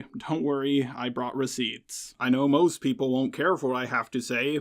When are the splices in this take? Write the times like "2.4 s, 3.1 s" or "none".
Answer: 2.1 s